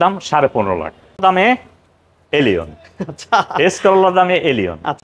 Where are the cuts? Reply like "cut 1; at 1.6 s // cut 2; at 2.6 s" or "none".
cut 1; at 1.2 s